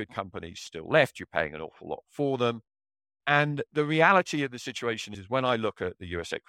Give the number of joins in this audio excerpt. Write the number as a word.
one